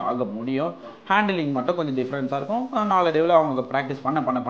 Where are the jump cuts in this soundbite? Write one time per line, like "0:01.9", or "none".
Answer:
none